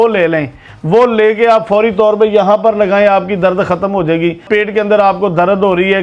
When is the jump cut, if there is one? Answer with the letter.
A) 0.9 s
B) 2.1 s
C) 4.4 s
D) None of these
D